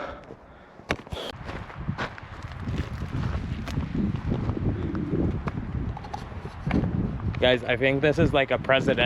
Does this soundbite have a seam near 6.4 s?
no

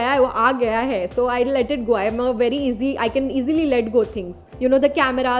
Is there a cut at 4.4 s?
yes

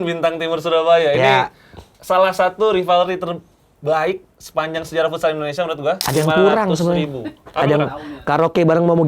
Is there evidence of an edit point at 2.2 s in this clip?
no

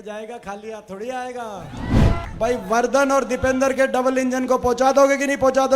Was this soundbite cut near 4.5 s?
no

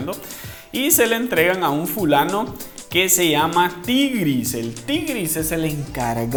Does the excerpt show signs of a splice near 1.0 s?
no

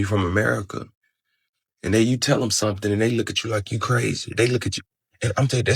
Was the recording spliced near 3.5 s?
no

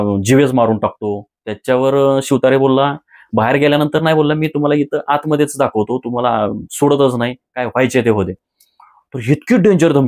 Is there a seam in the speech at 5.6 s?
no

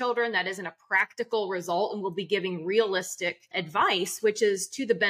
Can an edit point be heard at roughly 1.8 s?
no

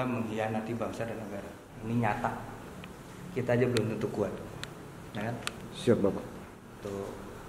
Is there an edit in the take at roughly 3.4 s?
no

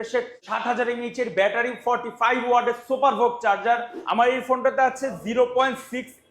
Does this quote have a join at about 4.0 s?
yes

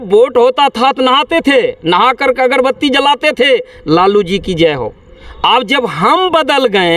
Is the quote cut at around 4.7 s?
no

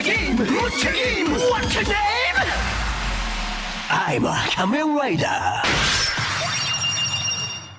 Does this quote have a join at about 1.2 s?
no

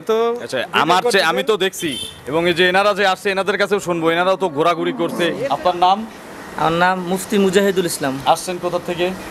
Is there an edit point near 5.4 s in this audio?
yes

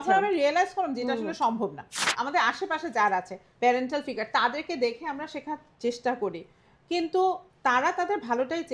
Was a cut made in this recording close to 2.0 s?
yes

